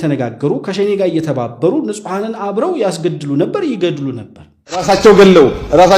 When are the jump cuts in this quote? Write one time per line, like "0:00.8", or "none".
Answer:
0:04.8